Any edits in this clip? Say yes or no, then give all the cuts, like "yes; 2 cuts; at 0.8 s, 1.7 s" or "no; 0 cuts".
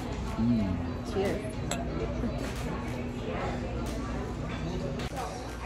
no; 0 cuts